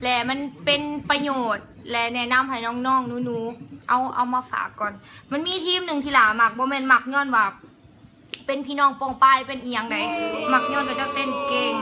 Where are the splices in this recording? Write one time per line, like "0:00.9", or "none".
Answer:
none